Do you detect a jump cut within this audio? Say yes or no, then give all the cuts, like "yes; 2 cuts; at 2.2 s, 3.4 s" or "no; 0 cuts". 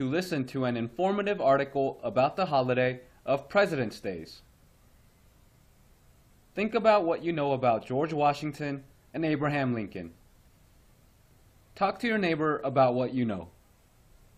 no; 0 cuts